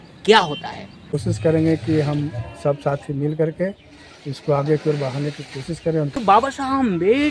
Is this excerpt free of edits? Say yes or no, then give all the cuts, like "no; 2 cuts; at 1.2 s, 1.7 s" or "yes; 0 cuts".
no; 2 cuts; at 1.1 s, 6.2 s